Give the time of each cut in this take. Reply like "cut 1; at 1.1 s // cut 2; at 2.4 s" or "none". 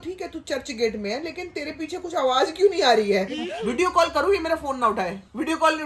cut 1; at 3.6 s